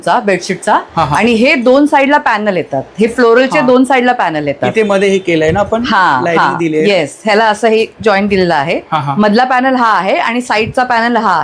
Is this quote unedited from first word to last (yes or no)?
yes